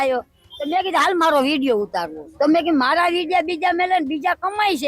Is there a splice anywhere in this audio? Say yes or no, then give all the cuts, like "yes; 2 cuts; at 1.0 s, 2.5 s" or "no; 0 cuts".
yes; 1 cut; at 2.2 s